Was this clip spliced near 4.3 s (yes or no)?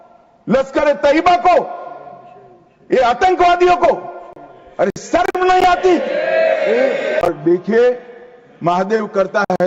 no